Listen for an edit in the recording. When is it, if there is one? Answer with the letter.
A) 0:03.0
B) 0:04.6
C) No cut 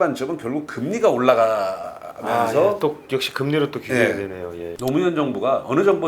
B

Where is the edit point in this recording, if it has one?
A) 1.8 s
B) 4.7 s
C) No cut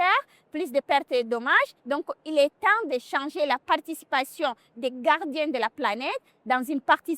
A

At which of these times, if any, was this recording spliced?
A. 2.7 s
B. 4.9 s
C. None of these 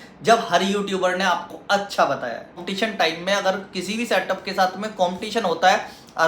A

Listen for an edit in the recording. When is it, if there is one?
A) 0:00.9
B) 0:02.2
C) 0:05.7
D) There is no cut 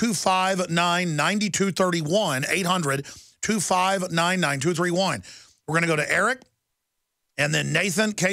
B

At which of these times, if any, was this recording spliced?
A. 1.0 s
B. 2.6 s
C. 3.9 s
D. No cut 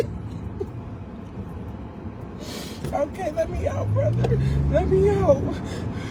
D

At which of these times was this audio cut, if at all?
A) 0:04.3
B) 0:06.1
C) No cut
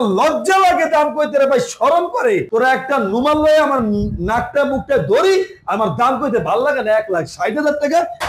C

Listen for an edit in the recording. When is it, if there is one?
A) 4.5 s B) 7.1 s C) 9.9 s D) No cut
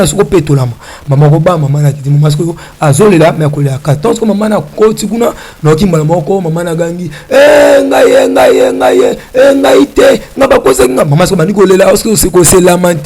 D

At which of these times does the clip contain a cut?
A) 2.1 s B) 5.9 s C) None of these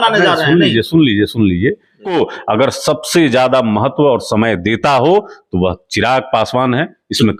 A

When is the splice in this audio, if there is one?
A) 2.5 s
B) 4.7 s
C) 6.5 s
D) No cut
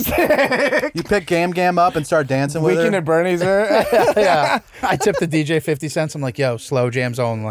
B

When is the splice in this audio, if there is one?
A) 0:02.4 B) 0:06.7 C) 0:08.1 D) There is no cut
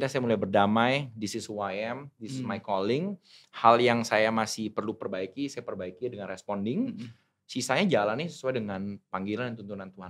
D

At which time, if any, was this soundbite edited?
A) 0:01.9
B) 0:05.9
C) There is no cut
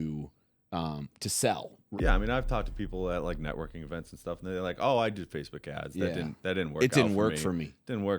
A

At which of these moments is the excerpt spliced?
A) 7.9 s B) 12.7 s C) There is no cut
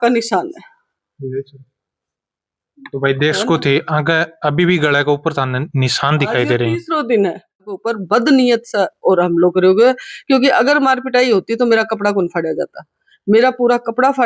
A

